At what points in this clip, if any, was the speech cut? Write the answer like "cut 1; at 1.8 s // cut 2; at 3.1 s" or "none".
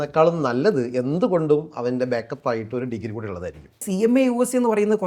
cut 1; at 3.8 s